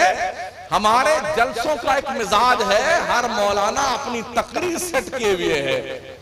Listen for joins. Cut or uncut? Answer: uncut